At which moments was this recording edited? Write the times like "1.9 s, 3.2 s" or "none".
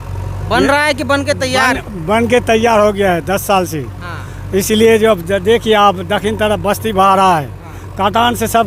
none